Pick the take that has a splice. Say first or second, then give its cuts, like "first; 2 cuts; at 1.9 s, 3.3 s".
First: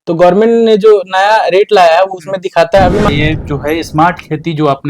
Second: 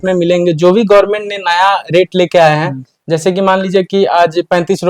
first; 1 cut; at 3.1 s